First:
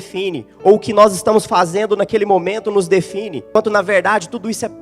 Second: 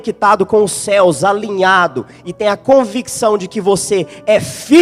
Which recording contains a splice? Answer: first; 1 cut; at 3.6 s

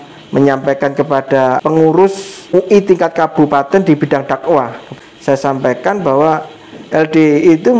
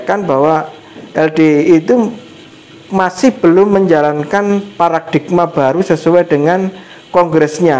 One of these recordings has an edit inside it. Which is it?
first; 3 cuts; at 1.6 s, 2.5 s, 4.9 s

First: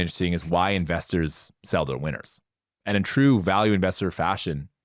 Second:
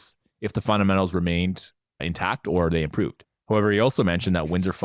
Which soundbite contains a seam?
second; 2 cuts; at 2.0 s, 3.3 s

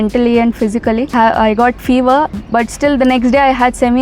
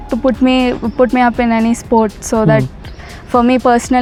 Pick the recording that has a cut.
first; 2 cuts; at 1.1 s, 2.4 s

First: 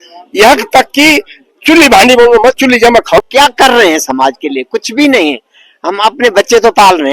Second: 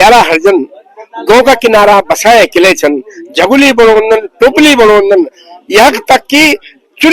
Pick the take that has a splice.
first; 1 cut; at 3.2 s

